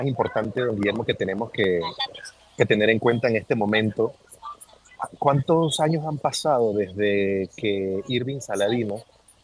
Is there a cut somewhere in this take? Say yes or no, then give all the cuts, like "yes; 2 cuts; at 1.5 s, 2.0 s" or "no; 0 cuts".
no; 0 cuts